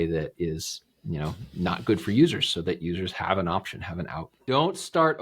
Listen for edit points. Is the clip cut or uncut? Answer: cut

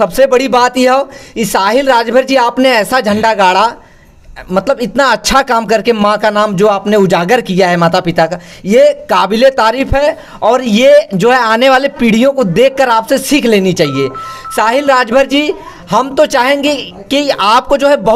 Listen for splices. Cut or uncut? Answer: uncut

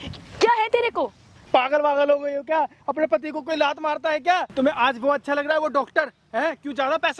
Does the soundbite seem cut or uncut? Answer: cut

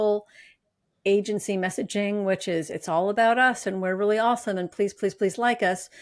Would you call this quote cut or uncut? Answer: uncut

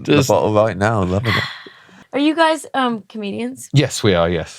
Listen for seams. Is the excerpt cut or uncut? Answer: cut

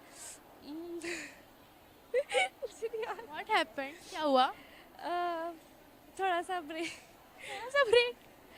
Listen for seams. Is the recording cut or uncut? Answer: uncut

